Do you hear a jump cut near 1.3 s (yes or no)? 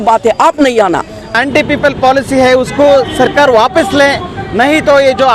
yes